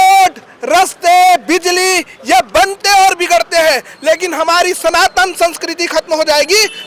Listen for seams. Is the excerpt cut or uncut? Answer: uncut